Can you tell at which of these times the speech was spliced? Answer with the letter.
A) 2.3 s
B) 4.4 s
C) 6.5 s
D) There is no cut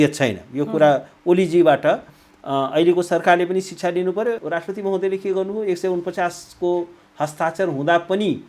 B